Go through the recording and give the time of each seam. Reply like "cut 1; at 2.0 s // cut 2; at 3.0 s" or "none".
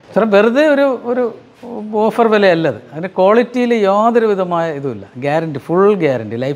none